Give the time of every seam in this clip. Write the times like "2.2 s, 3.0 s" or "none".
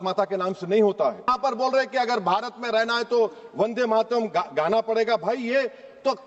1.2 s